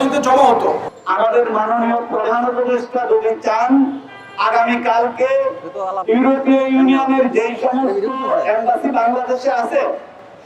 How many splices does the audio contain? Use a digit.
1